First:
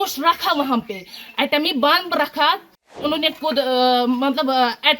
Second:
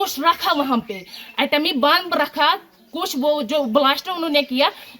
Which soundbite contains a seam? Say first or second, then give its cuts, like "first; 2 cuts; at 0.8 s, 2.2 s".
first; 1 cut; at 2.9 s